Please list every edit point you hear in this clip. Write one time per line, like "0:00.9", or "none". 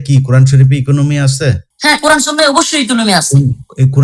0:01.4